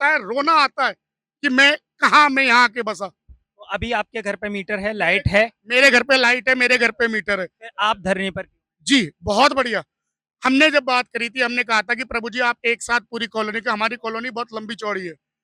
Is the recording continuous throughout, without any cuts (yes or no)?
yes